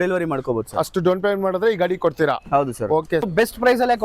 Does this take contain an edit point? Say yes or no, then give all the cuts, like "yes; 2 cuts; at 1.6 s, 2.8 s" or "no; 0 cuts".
yes; 1 cut; at 3.1 s